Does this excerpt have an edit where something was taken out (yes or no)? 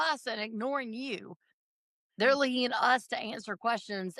no